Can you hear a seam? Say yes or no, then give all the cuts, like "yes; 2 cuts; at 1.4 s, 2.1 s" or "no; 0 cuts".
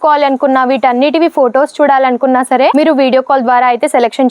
no; 0 cuts